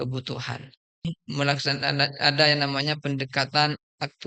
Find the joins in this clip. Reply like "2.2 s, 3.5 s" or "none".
1.1 s